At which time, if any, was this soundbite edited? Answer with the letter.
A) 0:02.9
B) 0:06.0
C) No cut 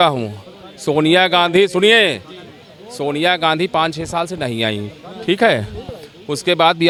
C